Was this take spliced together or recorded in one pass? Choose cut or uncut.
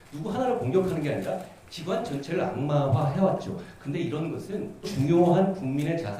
cut